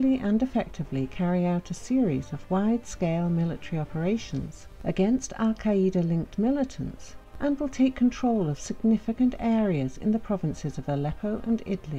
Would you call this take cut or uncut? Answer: cut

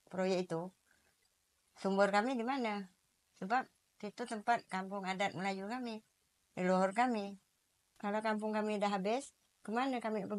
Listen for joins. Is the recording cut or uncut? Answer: uncut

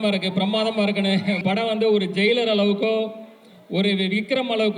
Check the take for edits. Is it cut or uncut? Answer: cut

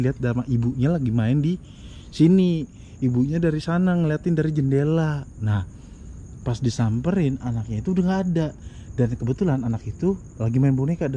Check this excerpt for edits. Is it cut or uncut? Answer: uncut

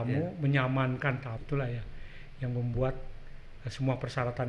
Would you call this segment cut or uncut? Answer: cut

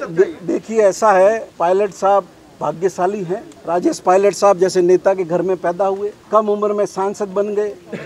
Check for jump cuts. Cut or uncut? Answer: cut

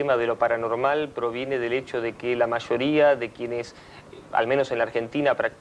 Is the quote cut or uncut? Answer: cut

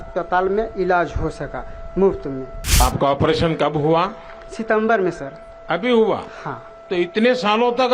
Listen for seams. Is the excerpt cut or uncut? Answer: cut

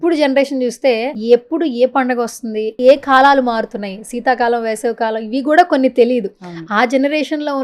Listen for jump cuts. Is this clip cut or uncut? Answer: cut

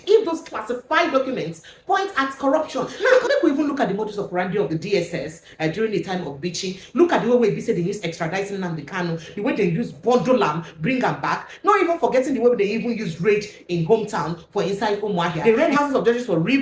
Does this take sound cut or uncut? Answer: cut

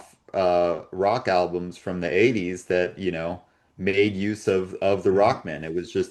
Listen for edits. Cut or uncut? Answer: uncut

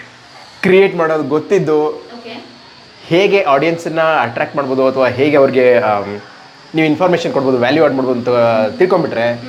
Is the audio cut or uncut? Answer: uncut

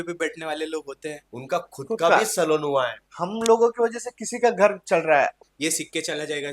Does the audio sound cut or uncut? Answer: cut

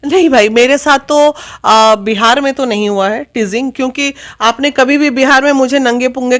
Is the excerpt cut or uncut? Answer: uncut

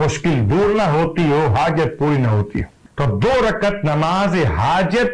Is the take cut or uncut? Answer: cut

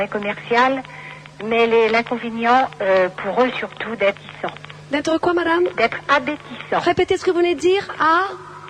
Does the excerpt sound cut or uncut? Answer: uncut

